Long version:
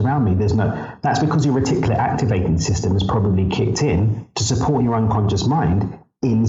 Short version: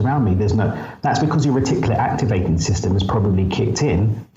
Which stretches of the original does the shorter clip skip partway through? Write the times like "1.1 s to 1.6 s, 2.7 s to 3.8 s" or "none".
none